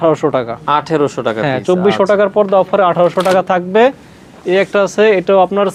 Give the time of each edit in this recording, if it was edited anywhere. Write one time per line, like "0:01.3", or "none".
none